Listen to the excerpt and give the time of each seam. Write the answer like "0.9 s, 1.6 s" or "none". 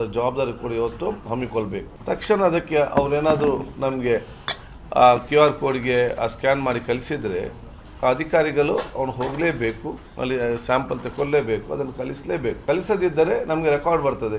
1.9 s, 12.6 s